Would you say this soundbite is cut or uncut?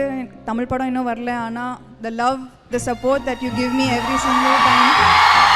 uncut